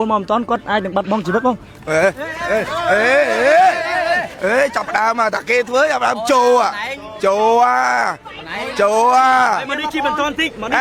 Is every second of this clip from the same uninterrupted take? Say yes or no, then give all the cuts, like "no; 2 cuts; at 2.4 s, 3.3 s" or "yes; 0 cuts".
yes; 0 cuts